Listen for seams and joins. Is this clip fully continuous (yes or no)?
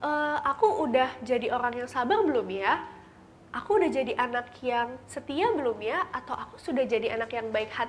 yes